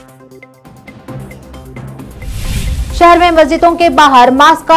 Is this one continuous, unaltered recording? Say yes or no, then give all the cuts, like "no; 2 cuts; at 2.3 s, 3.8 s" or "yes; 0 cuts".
no; 1 cut; at 1.0 s